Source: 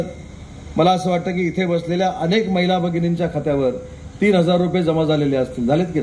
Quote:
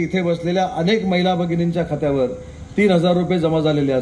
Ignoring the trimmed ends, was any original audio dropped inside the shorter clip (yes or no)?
no